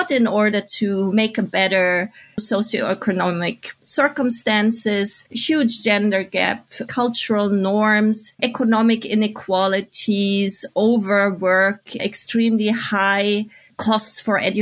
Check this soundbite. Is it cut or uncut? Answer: cut